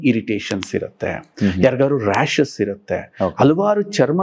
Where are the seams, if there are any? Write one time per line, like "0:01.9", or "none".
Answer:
none